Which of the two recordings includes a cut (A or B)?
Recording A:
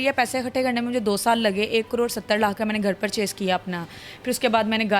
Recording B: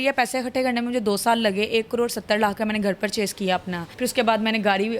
B